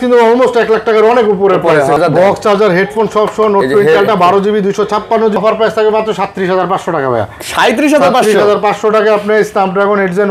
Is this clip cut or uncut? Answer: cut